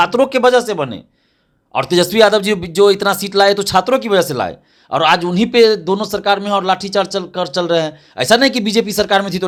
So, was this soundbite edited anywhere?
no; 0 cuts

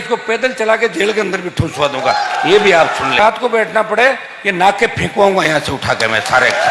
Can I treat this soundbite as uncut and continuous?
no; 1 cut; at 3.2 s

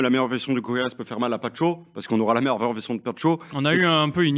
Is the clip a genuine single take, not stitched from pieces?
yes; 0 cuts

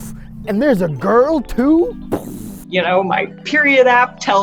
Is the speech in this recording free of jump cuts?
no; 1 cut; at 2.5 s

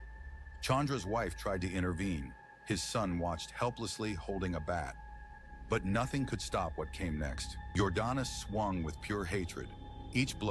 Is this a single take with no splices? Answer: no; 1 cut; at 7.5 s

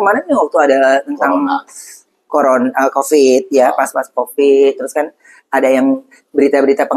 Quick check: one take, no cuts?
yes; 0 cuts

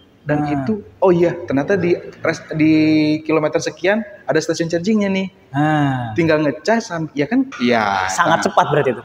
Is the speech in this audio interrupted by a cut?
yes; 1 cut; at 7.5 s

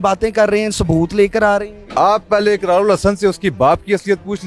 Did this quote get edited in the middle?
yes; 1 cut; at 1.8 s

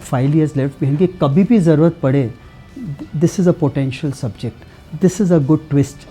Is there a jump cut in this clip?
no; 0 cuts

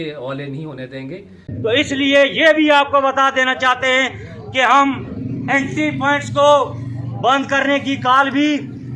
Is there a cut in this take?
yes; 1 cut; at 1.5 s

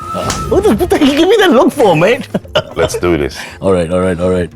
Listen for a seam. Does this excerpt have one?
no; 0 cuts

